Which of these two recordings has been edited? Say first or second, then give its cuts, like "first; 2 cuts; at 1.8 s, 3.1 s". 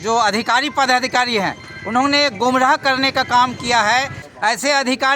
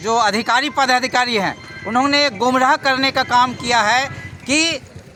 first; 1 cut; at 4.2 s